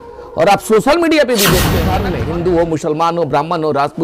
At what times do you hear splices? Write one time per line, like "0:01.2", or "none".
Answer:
0:01.9